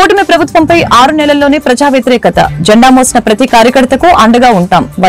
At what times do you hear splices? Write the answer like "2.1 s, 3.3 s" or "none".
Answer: none